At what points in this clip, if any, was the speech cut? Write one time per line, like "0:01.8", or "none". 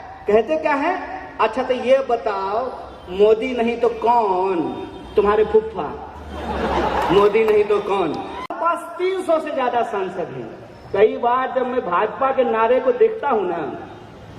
0:08.5